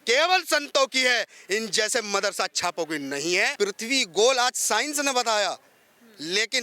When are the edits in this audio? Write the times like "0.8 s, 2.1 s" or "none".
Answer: 3.5 s